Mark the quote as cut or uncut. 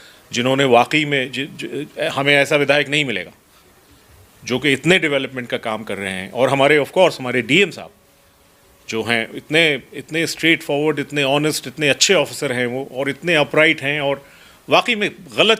uncut